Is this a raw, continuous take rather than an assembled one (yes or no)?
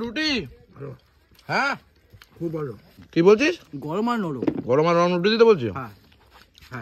no